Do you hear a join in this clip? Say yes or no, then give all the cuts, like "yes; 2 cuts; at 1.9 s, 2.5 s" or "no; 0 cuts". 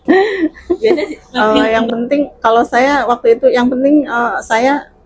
yes; 1 cut; at 1.0 s